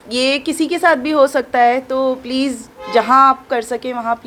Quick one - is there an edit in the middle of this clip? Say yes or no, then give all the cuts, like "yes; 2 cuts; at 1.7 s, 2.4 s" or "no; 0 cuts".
no; 0 cuts